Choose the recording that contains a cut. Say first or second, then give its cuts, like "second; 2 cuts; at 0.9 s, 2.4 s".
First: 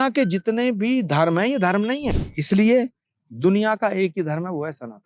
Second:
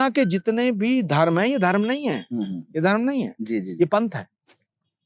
first; 1 cut; at 2.2 s